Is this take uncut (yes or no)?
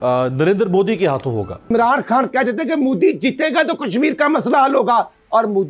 no